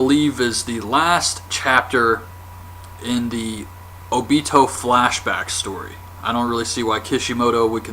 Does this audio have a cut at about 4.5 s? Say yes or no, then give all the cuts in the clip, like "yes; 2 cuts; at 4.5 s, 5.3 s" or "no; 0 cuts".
yes; 1 cut; at 4.5 s